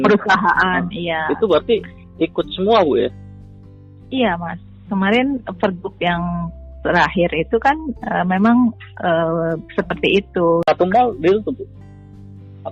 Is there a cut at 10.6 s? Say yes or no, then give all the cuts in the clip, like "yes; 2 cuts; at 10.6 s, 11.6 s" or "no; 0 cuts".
yes; 1 cut; at 10.6 s